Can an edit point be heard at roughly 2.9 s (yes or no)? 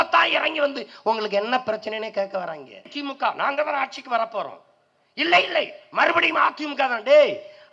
yes